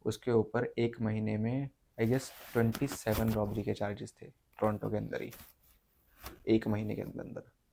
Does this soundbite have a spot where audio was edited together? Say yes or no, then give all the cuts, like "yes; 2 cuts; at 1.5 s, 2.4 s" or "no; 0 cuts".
no; 0 cuts